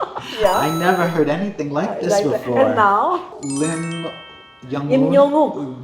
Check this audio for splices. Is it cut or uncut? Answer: cut